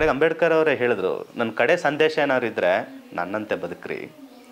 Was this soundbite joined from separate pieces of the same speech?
no; 0 cuts

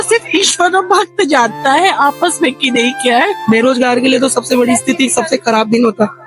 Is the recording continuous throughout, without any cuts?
no; 1 cut; at 3.4 s

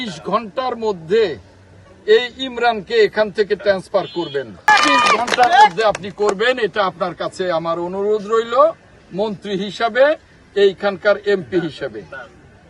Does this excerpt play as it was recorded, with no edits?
yes; 0 cuts

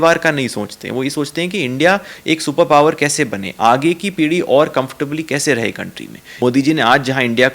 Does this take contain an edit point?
yes; 1 cut; at 6.4 s

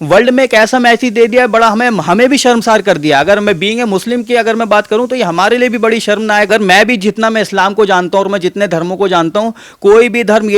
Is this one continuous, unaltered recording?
no; 1 cut; at 6.5 s

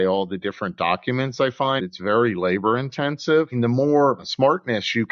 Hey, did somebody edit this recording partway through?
yes; 3 cuts; at 1.8 s, 3.5 s, 4.3 s

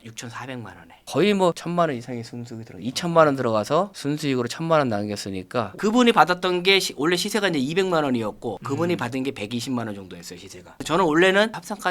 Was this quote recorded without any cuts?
no; 2 cuts; at 1.0 s, 5.8 s

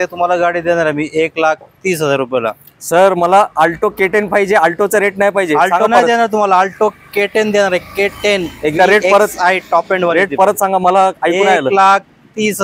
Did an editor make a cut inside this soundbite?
no; 0 cuts

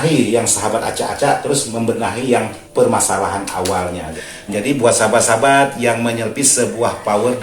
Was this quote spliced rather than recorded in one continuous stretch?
yes; 2 cuts; at 2.6 s, 4.1 s

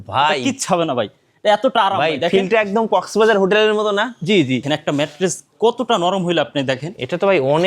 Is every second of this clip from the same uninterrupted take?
no; 1 cut; at 4.6 s

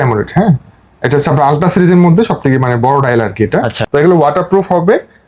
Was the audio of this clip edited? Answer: yes; 1 cut; at 3.8 s

